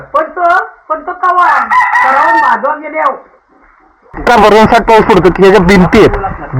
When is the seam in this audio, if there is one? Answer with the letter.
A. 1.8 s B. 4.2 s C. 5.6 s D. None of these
B